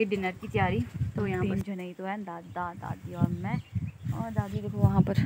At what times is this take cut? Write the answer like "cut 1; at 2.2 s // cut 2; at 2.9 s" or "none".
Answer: cut 1; at 1.4 s